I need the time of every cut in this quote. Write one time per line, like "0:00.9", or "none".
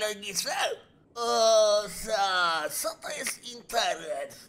none